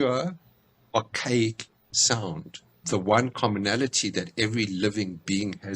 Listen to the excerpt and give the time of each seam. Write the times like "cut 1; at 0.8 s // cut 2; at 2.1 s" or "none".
cut 1; at 2.8 s